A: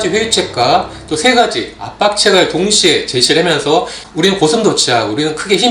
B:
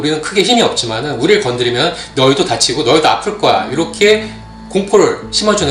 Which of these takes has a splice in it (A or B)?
A